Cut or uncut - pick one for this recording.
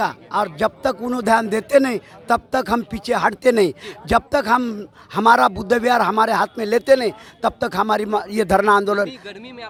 uncut